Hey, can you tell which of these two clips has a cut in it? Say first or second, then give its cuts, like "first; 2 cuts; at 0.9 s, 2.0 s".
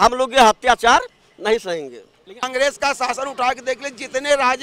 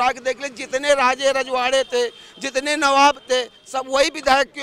first; 1 cut; at 2.5 s